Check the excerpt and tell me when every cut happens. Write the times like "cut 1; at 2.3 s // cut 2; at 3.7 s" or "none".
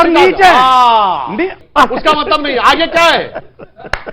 cut 1; at 1.6 s